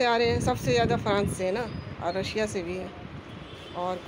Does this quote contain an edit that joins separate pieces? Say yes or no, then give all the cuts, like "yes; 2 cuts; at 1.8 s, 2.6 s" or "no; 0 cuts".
no; 0 cuts